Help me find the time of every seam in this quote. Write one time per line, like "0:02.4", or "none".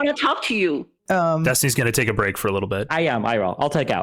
0:01.0
0:02.9